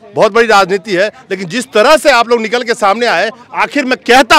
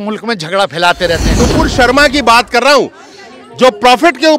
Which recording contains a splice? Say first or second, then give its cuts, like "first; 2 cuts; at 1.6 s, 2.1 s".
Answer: second; 1 cut; at 1.4 s